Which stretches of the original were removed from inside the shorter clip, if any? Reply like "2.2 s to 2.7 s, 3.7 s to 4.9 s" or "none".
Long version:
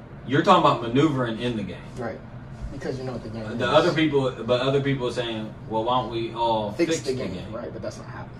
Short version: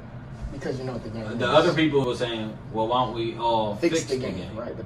4.2 s to 5.0 s